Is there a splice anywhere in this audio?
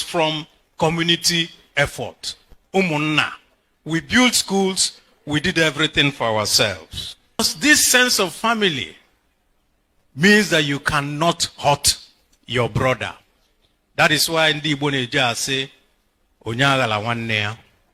yes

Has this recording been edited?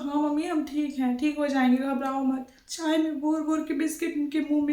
yes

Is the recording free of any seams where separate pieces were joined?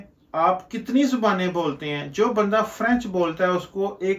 yes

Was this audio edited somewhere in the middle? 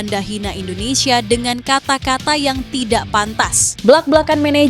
yes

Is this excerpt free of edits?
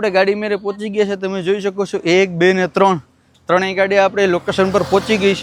yes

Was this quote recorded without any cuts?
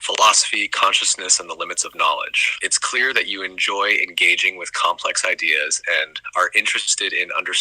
yes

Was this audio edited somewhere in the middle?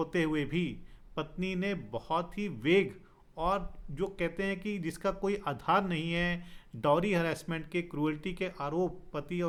no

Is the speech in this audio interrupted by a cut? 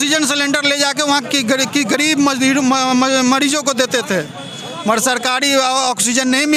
no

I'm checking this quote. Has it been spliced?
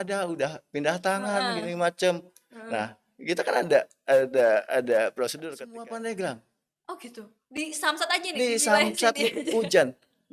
yes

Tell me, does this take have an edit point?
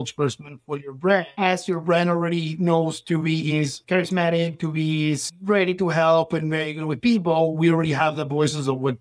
yes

